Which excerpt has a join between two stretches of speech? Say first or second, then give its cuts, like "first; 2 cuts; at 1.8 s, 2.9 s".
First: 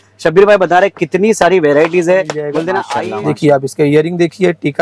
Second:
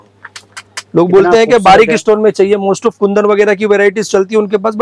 first; 1 cut; at 2.8 s